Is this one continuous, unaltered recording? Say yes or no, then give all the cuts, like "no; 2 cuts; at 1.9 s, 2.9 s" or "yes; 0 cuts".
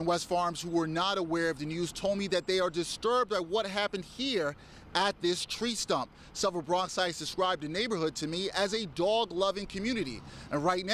yes; 0 cuts